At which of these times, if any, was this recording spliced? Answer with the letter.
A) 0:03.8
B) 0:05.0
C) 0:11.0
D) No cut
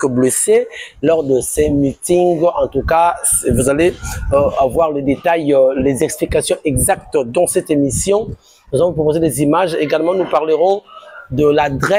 D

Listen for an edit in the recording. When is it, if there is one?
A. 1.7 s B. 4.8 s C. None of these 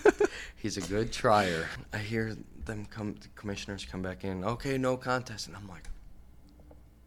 A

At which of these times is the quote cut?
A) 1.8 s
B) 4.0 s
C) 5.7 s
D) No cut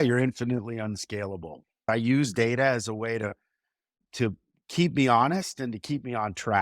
A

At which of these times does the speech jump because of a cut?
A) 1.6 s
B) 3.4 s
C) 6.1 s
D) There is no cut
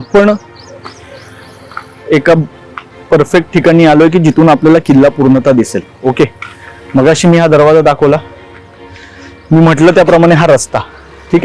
D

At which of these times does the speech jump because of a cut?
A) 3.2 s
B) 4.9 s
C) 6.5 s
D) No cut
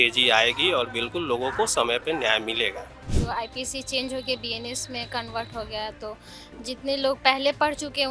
A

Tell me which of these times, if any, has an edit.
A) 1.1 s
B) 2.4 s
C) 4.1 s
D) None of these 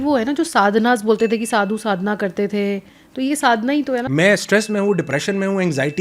C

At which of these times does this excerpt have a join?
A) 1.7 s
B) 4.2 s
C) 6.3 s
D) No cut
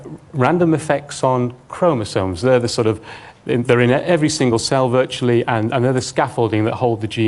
B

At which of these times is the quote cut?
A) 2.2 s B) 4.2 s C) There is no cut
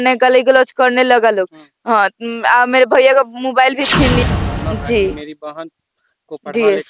B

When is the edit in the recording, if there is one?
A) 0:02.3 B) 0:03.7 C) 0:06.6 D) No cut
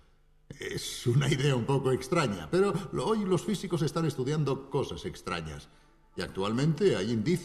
B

